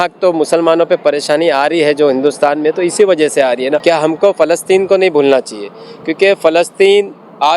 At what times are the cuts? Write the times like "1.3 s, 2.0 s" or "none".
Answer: 3.8 s